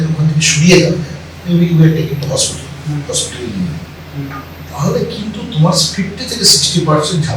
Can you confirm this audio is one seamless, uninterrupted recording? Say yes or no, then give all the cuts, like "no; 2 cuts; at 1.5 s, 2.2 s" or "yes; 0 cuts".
yes; 0 cuts